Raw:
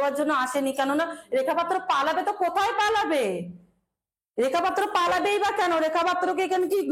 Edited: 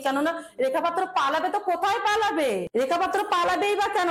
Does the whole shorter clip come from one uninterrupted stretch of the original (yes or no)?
no